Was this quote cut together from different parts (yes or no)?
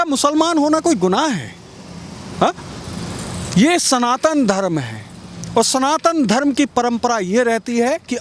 no